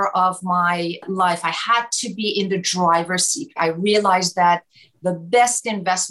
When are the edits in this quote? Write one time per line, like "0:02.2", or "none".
0:01.0
0:03.5